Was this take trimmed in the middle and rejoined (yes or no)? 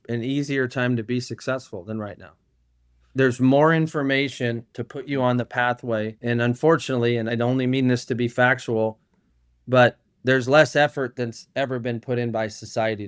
no